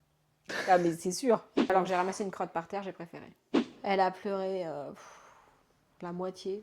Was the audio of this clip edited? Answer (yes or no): yes